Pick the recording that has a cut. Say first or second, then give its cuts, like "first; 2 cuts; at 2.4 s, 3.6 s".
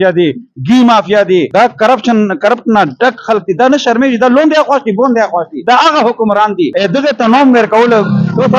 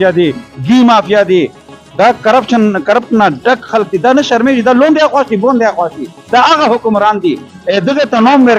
first; 3 cuts; at 1.5 s, 5.5 s, 6.7 s